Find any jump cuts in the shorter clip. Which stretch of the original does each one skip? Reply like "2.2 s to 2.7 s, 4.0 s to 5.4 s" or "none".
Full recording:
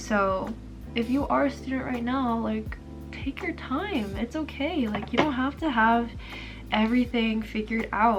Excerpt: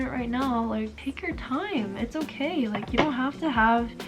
2.7 s to 3.2 s